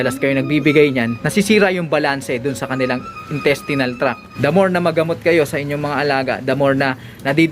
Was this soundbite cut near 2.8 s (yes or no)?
no